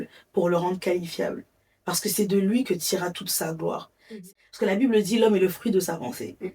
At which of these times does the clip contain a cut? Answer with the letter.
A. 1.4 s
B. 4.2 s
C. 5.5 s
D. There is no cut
B